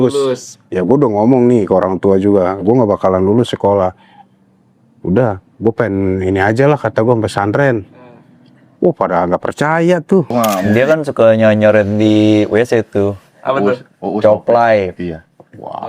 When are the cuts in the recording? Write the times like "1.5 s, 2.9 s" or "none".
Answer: 10.3 s